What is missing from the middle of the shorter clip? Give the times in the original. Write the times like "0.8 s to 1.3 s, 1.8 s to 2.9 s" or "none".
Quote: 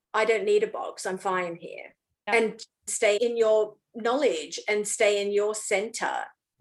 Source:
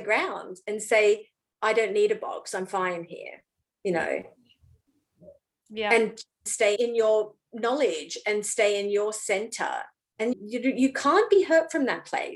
3.8 s to 5.9 s